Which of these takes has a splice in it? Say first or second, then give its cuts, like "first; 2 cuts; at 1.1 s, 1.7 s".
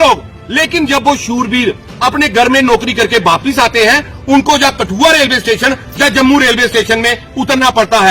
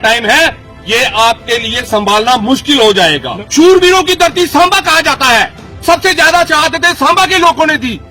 second; 1 cut; at 3.3 s